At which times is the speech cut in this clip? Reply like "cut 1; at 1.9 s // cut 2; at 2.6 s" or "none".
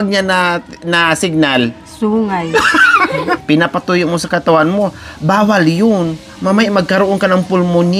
cut 1; at 3.2 s